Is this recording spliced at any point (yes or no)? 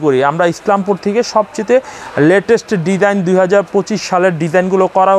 no